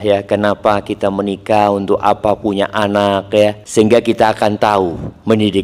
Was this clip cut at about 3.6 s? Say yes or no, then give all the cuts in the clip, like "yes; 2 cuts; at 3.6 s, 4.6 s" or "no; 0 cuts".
yes; 1 cut; at 3.6 s